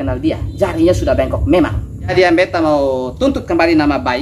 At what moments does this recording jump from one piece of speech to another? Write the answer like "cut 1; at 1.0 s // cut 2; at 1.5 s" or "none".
cut 1; at 2.1 s

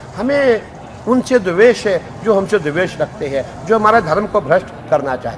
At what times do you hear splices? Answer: none

